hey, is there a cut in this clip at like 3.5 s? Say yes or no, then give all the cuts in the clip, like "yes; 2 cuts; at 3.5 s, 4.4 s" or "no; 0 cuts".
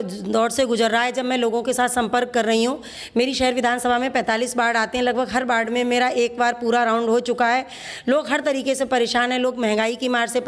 no; 0 cuts